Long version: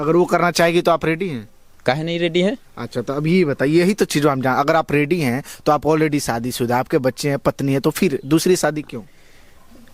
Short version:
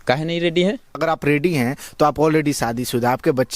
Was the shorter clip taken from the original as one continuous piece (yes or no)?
no